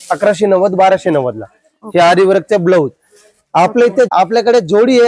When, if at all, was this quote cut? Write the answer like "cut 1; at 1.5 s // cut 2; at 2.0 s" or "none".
cut 1; at 4.1 s